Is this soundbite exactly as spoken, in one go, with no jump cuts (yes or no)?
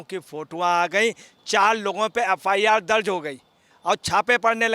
yes